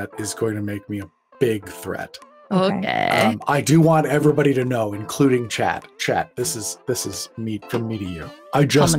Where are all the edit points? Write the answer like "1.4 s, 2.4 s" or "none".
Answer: none